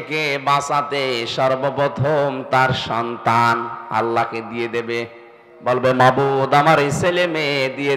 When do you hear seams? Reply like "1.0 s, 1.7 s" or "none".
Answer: none